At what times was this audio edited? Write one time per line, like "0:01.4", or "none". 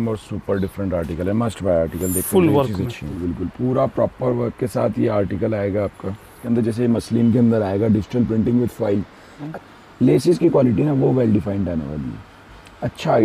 0:03.2
0:06.4
0:09.6